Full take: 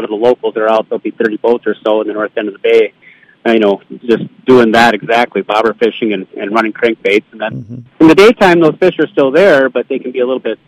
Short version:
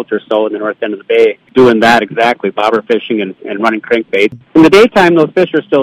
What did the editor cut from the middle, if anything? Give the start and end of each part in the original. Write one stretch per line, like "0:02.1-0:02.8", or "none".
0:03.0-0:04.3
0:07.3-0:07.9